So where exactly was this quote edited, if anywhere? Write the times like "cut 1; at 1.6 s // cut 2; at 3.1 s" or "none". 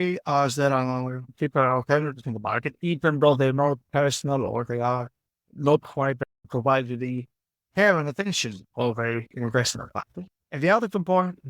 cut 1; at 1.2 s